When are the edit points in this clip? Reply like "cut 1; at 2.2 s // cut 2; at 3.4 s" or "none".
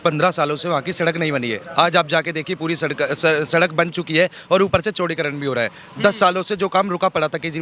none